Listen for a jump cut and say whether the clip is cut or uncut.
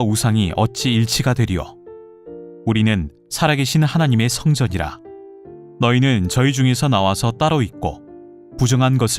uncut